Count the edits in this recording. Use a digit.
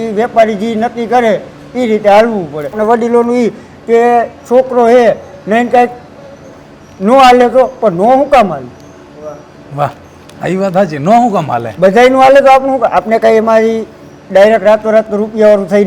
1